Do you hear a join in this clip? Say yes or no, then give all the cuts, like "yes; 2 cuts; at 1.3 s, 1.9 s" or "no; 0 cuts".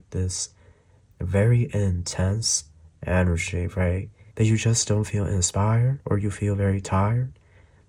yes; 1 cut; at 4.2 s